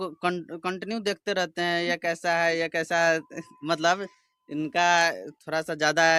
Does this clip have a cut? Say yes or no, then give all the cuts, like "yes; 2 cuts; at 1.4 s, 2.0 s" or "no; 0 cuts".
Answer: no; 0 cuts